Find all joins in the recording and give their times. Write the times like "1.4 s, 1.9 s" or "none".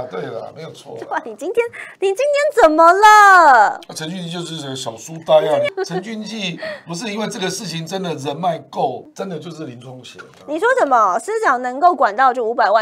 5.7 s, 9.1 s